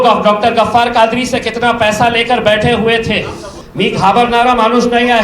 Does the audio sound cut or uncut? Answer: cut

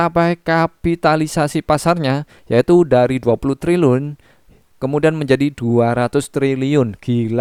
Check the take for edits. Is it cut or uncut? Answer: uncut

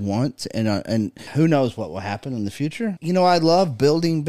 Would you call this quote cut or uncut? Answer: cut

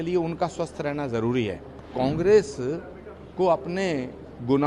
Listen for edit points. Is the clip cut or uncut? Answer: cut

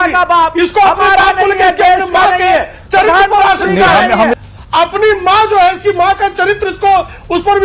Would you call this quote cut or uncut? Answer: cut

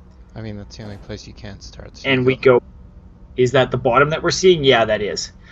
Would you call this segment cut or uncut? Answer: uncut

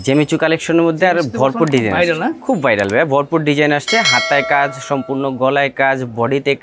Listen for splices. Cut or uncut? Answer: uncut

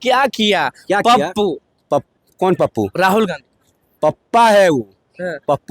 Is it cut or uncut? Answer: uncut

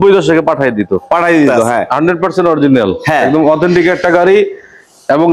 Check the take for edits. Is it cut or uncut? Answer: cut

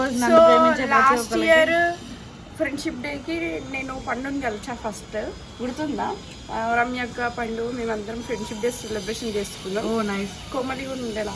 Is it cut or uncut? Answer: uncut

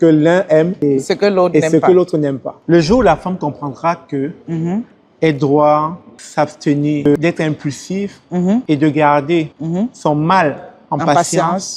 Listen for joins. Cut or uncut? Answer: cut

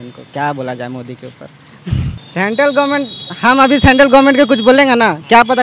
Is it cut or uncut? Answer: cut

